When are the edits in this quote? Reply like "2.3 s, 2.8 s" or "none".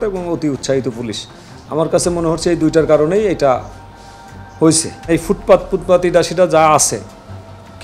5.1 s